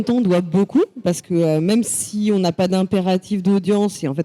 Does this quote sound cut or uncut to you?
uncut